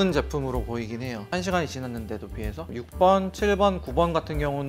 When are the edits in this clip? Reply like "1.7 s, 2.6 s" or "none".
1.3 s, 2.7 s